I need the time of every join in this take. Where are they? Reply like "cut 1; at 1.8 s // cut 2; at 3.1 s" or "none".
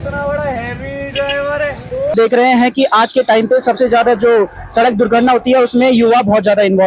cut 1; at 2.1 s